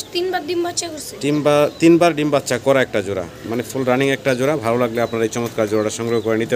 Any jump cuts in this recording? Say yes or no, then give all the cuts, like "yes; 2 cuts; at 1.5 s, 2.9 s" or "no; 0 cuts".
no; 0 cuts